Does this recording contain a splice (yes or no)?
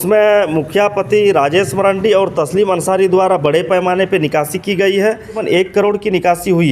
yes